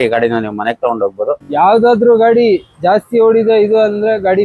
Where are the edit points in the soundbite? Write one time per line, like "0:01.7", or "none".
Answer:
0:01.5